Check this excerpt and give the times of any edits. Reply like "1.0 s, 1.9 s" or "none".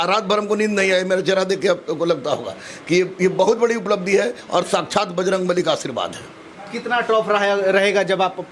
none